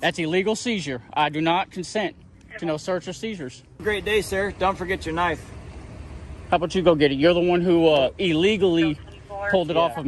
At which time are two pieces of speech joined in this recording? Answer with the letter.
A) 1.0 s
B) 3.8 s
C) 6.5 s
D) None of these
B